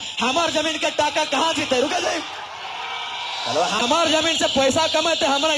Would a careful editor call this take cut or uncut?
uncut